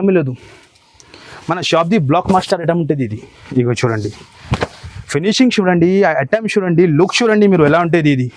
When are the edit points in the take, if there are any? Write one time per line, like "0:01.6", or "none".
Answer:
none